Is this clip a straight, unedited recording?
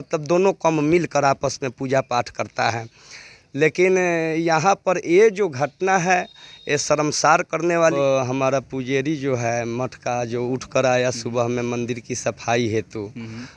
no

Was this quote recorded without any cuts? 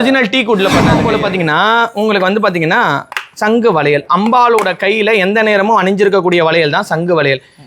no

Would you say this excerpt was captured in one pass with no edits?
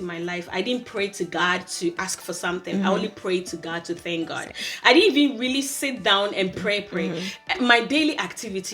yes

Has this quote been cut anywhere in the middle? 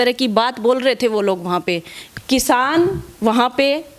yes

